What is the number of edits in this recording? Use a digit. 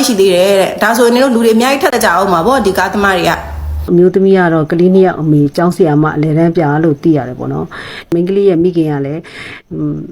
2